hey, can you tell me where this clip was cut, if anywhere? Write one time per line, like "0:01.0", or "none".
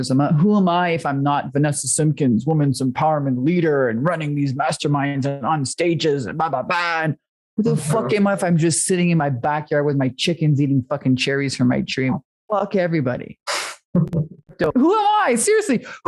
0:14.6